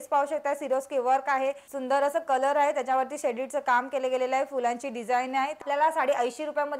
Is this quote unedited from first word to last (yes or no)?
no